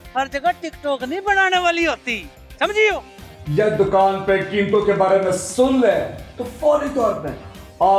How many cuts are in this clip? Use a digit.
1